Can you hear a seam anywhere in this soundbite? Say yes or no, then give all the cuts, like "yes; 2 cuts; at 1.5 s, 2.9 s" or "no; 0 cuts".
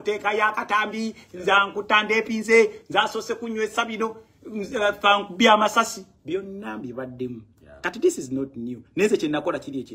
no; 0 cuts